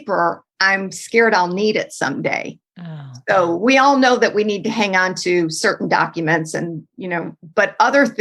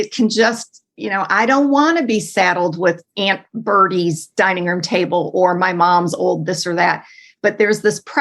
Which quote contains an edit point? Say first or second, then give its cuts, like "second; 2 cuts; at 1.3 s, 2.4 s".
second; 1 cut; at 3.1 s